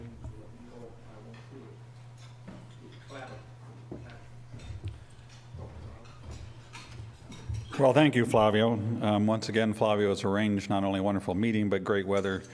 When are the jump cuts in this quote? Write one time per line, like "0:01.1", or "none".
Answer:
none